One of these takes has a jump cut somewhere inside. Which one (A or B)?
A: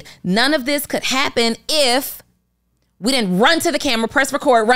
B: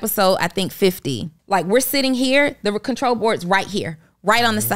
B